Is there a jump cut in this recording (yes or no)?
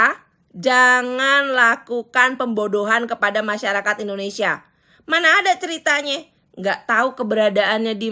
no